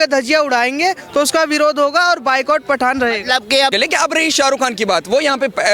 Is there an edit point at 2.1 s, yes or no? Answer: no